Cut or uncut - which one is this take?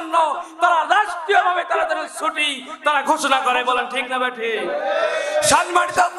uncut